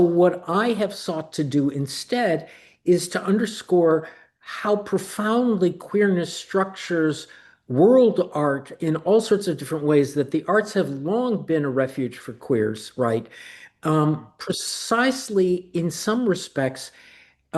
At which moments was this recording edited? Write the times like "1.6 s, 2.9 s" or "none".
none